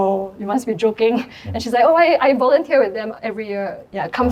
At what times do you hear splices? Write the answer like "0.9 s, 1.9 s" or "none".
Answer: none